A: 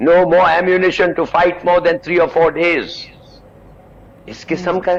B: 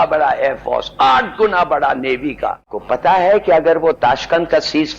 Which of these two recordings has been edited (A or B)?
B